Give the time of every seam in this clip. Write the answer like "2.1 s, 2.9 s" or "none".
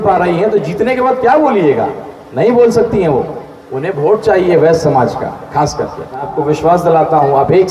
6.3 s